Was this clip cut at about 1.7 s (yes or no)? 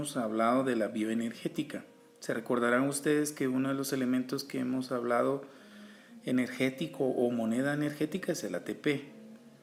no